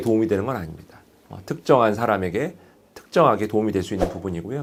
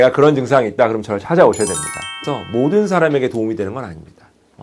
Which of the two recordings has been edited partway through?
second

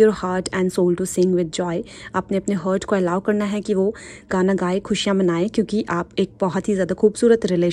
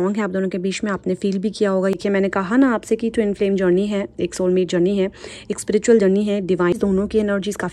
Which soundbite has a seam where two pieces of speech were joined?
second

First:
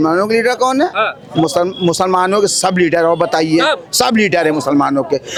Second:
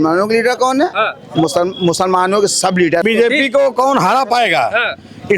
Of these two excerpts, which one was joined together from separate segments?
second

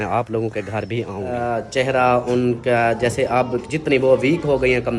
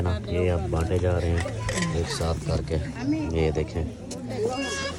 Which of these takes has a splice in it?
first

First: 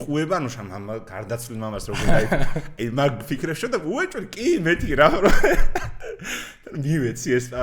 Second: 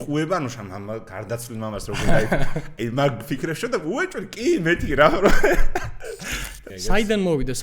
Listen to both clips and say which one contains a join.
second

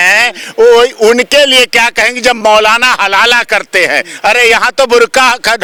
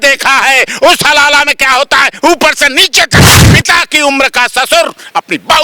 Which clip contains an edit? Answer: second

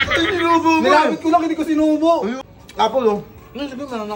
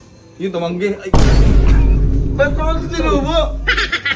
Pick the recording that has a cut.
first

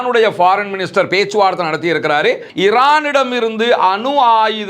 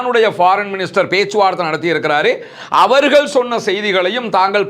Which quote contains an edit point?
first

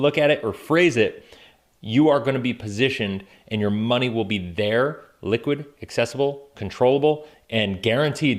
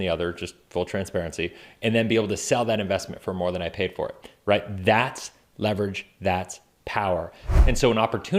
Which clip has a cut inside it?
second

